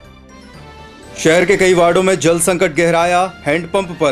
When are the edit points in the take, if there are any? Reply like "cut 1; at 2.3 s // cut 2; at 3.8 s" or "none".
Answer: none